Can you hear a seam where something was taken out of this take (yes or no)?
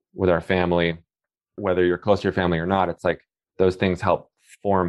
yes